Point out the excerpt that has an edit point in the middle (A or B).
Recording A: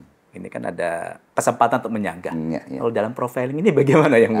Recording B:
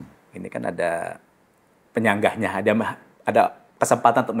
A